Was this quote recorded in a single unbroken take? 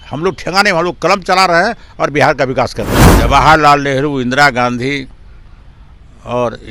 no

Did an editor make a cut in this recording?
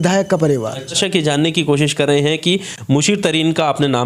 yes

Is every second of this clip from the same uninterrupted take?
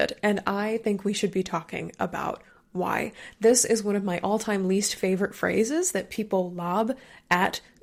yes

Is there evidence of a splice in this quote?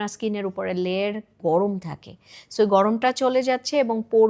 no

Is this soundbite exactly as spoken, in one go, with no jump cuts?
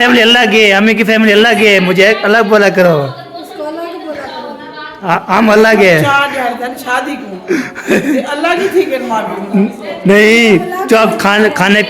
yes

